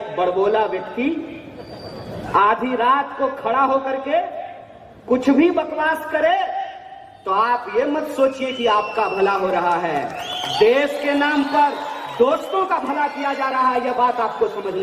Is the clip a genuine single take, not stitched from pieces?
yes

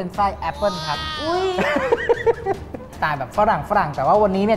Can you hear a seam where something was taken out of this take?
yes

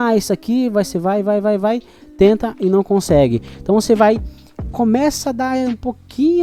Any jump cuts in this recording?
no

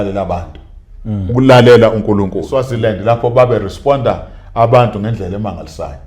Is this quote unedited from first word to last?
no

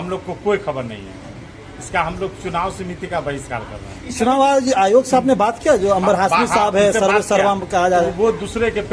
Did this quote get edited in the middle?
no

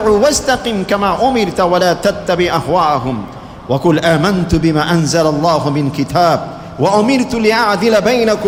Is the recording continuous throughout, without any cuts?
yes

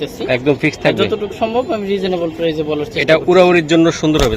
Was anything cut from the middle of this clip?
no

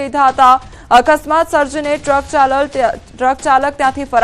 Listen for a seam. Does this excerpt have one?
yes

